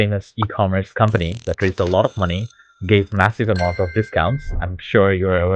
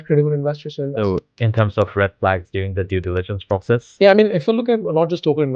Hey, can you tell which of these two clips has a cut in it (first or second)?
second